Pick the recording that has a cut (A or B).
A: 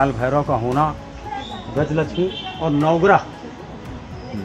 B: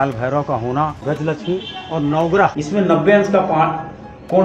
B